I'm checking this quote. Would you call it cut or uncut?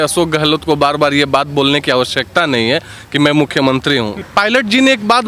cut